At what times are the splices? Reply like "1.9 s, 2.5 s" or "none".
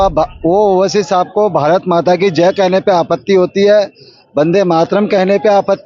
none